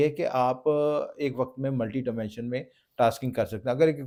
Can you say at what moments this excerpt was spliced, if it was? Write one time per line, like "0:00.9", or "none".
none

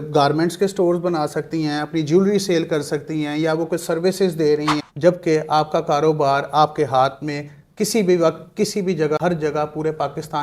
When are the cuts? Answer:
0:04.8
0:09.2

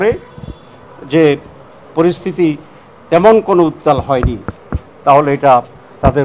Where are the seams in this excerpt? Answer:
none

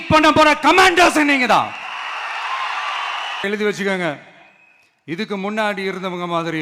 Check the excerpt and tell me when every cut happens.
0:03.4

